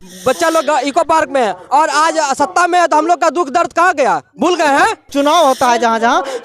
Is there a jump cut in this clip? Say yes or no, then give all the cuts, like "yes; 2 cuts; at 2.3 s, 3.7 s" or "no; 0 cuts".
yes; 1 cut; at 5.1 s